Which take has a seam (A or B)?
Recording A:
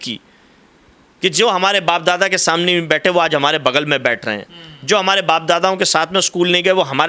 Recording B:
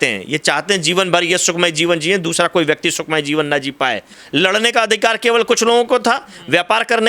B